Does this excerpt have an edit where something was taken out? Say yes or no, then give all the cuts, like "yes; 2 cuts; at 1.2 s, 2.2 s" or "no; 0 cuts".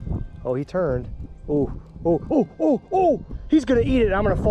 yes; 1 cut; at 3.3 s